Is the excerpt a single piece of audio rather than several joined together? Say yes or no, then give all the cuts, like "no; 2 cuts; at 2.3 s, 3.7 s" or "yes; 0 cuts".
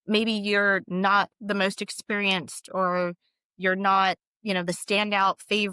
yes; 0 cuts